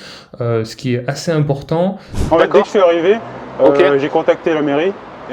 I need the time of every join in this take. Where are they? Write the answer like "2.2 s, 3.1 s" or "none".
2.2 s